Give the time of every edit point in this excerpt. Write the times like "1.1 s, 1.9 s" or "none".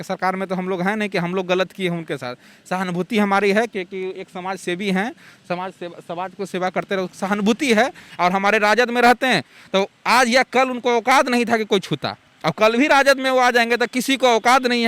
8.0 s